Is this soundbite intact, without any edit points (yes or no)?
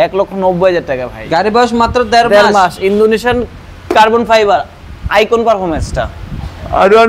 no